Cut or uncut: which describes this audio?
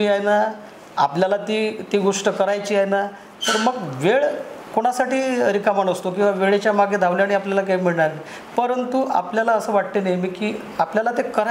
uncut